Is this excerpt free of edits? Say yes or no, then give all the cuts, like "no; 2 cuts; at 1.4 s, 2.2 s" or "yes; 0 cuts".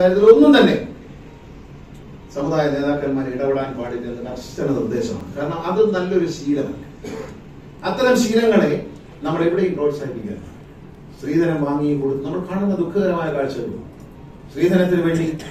yes; 0 cuts